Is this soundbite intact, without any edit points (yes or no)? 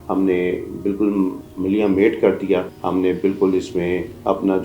no